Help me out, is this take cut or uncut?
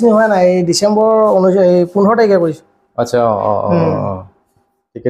uncut